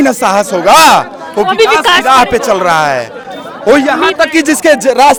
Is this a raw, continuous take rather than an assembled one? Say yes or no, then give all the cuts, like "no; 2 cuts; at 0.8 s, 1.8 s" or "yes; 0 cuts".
yes; 0 cuts